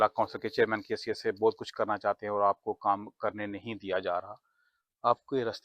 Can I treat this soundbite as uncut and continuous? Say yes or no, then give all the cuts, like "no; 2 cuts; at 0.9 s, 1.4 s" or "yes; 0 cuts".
yes; 0 cuts